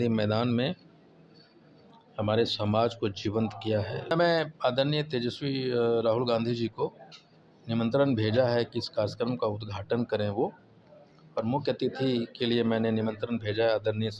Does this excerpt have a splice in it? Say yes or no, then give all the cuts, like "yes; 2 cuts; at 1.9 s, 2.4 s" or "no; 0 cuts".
yes; 1 cut; at 4.1 s